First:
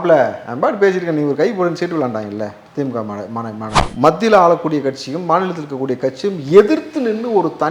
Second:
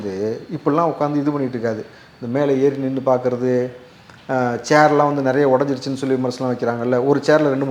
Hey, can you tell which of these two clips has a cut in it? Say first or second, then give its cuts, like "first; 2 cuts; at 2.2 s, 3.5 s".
first; 1 cut; at 3.8 s